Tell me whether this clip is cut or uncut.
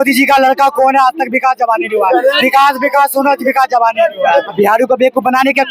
cut